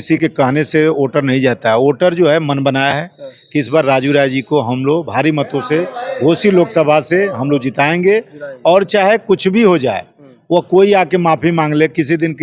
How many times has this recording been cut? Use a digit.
0